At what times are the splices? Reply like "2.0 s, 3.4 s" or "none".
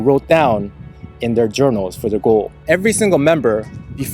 2.5 s